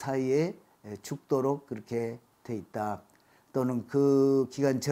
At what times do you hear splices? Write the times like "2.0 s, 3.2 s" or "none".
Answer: none